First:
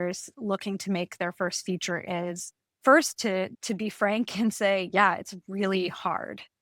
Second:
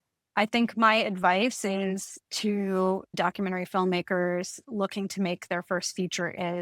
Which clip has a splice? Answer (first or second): second